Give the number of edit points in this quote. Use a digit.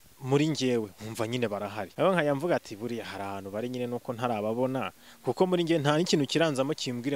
1